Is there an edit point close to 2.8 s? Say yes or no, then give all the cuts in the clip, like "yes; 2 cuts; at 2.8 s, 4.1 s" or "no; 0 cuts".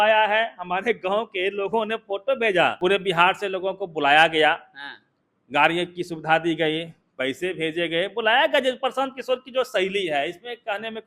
yes; 1 cut; at 2.8 s